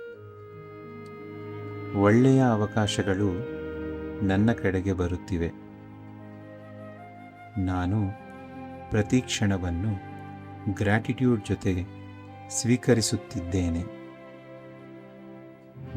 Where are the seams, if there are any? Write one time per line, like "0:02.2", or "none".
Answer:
none